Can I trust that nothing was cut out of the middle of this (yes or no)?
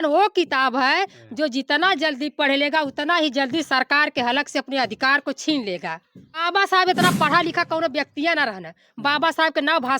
no